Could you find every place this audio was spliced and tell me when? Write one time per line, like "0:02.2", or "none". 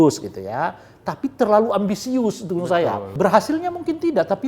0:03.1